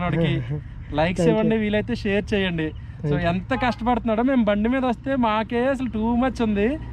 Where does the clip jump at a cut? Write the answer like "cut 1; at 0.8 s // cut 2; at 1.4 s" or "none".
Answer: none